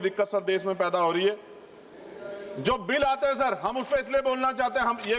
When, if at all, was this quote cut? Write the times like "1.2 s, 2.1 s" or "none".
none